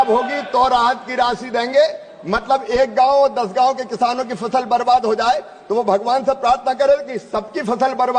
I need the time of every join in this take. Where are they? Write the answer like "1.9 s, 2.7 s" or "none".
none